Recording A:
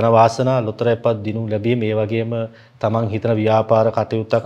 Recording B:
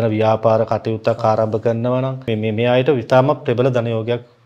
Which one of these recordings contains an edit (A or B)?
B